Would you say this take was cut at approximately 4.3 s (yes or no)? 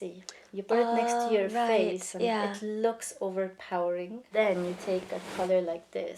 yes